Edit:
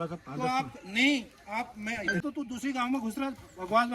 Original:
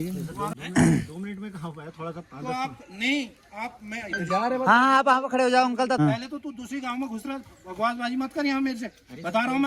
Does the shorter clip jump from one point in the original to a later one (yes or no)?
yes